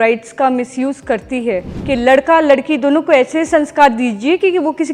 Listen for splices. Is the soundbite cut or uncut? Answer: cut